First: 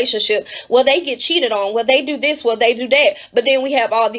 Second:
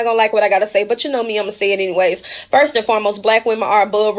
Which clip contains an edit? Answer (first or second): first